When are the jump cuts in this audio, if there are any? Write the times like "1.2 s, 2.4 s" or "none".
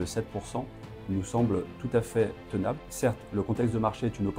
2.8 s